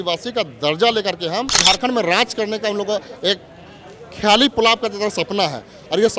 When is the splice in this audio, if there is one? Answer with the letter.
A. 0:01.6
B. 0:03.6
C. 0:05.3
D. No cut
A